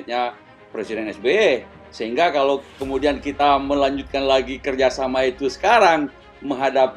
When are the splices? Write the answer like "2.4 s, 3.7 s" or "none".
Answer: none